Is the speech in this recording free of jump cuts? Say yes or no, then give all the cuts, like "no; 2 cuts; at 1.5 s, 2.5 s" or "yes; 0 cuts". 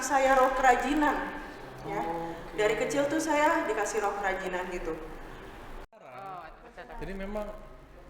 no; 1 cut; at 6.0 s